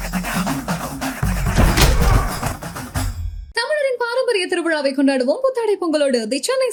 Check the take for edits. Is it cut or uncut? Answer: uncut